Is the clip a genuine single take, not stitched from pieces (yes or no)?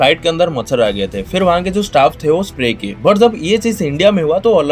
yes